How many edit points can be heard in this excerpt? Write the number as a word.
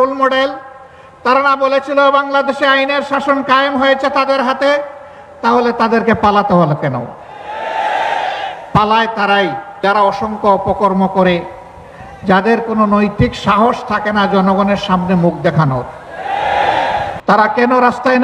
one